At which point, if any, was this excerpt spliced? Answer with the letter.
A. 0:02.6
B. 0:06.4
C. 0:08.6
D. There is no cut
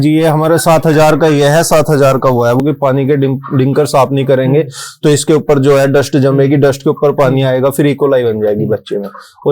A